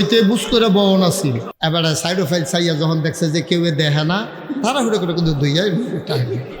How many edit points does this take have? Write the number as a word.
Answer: one